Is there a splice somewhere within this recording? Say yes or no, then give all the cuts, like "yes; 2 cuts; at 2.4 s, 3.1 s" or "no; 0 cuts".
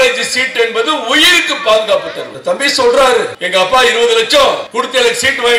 yes; 3 cuts; at 2.3 s, 3.4 s, 4.7 s